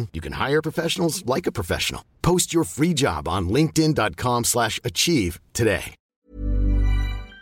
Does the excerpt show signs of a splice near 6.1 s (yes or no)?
yes